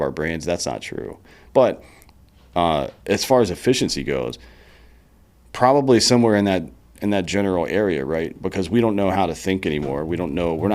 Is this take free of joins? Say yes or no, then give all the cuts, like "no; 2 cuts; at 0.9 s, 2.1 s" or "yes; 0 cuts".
no; 1 cut; at 1.3 s